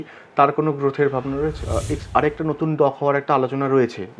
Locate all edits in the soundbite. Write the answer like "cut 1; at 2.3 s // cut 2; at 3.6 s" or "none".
cut 1; at 1.6 s